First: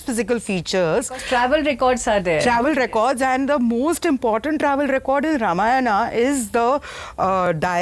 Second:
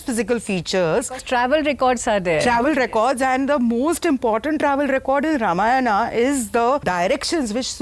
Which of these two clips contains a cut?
second; 1 cut; at 6.8 s

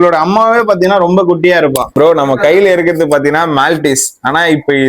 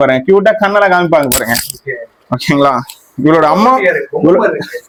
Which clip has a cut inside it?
first; 1 cut; at 1.9 s

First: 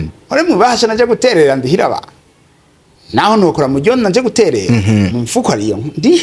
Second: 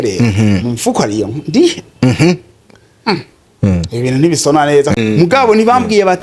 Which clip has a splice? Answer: second; 1 cut; at 5.0 s

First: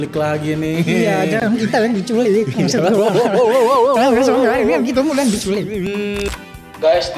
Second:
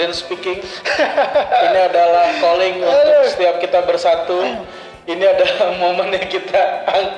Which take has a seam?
first; 1 cut; at 6.3 s

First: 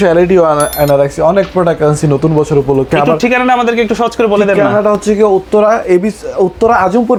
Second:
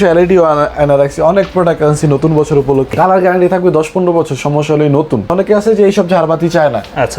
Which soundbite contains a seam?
second; 2 cuts; at 2.9 s, 5.3 s

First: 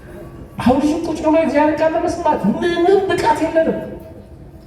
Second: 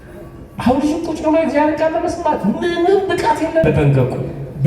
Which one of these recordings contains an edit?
second; 1 cut; at 3.7 s

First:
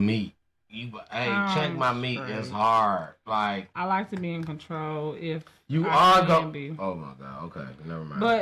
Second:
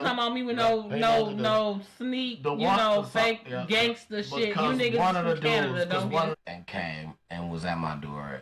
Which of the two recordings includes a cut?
second; 1 cut; at 6.3 s

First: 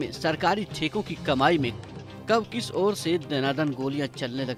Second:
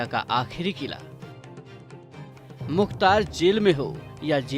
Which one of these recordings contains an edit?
second; 2 cuts; at 1.0 s, 2.7 s

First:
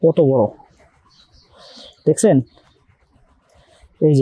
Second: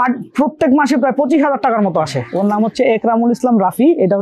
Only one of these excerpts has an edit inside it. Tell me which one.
second; 1 cut; at 2.2 s

